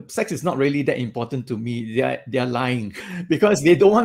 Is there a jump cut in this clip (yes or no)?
yes